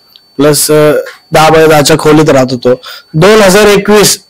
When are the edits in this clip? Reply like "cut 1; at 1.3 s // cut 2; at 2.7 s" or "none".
none